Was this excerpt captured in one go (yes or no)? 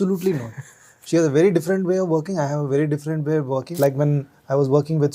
no